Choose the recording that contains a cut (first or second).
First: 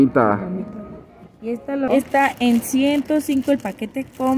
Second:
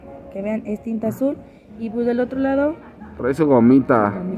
first